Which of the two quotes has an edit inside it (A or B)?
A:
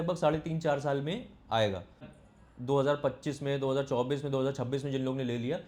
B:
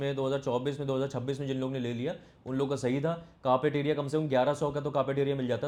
A